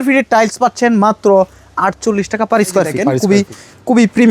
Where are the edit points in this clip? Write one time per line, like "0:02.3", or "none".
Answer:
0:03.0